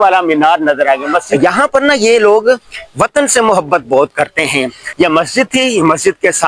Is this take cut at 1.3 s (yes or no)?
yes